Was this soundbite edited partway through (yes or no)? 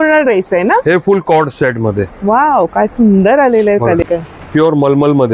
yes